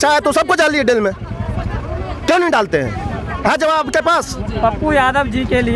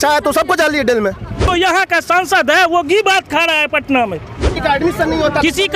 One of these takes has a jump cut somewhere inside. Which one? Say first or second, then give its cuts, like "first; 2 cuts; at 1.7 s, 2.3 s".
second; 2 cuts; at 1.4 s, 4.6 s